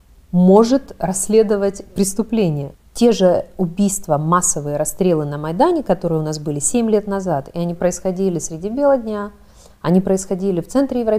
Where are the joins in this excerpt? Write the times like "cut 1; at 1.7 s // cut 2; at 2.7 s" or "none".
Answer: cut 1; at 2.7 s